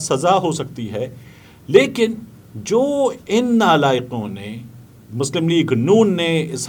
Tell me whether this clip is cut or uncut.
uncut